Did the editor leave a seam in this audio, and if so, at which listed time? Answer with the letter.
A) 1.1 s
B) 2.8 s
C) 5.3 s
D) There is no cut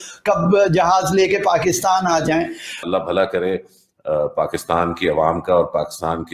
B